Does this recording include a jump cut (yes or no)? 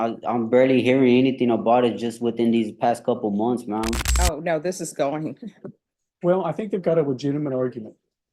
yes